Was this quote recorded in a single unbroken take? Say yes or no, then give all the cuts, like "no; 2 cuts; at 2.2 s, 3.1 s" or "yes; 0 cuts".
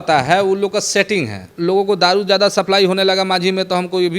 no; 1 cut; at 1.5 s